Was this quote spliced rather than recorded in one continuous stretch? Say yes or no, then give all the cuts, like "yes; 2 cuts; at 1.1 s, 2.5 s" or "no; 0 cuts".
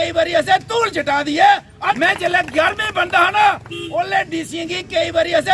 yes; 1 cut; at 2.0 s